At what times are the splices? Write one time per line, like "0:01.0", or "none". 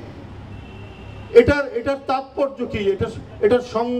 none